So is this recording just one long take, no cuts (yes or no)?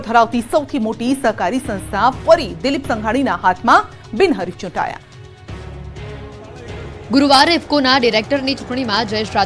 no